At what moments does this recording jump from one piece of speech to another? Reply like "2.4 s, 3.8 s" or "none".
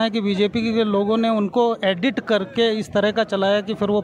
none